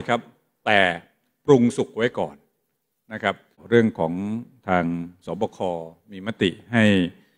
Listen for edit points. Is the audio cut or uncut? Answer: uncut